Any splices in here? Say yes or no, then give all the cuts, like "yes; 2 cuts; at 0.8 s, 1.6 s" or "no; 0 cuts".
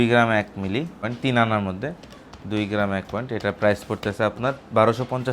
yes; 1 cut; at 1.1 s